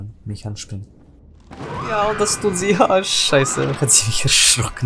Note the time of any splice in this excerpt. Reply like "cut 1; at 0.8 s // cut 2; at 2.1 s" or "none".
cut 1; at 1.9 s